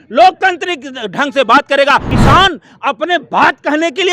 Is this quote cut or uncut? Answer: cut